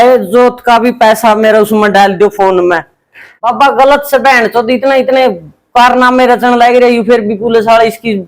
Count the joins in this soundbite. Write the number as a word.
one